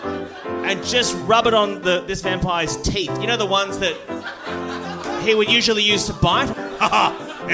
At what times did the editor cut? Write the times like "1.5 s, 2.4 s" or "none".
6.6 s